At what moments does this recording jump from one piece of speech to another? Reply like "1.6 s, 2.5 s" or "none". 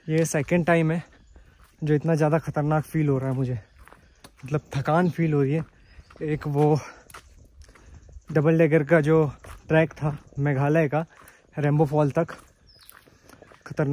none